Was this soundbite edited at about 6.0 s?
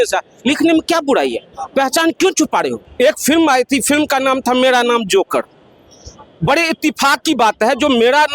no; 1 cut; at 2.8 s

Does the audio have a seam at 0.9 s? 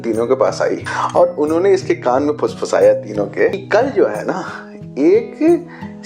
yes; 2 cuts; at 0.9 s, 3.6 s

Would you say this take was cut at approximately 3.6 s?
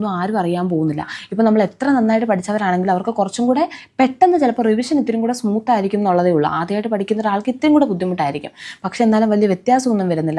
no; 0 cuts

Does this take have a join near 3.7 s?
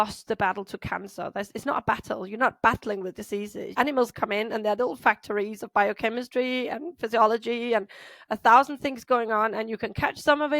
yes; 1 cut; at 3.7 s

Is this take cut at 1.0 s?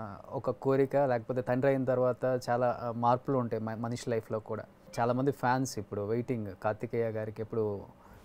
no; 1 cut; at 4.8 s

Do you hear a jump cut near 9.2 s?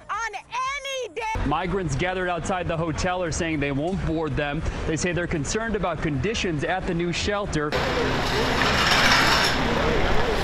no; 1 cut; at 7.7 s

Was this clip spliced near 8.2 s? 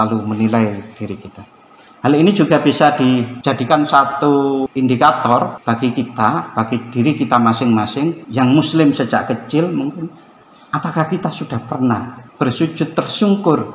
yes; 5 cuts; at 3.3 s, 4.7 s, 5.6 s, 8.2 s, 12.2 s

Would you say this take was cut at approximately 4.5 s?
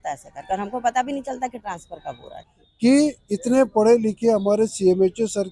no; 1 cut; at 2.5 s

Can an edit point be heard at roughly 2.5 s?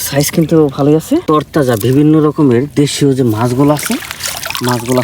no; 1 cut; at 1.2 s

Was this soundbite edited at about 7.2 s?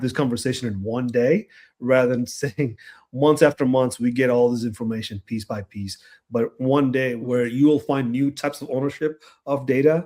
yes; 1 cut; at 7.2 s

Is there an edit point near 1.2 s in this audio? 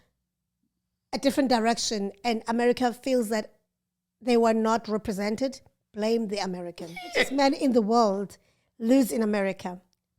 no; 1 cut; at 7.3 s

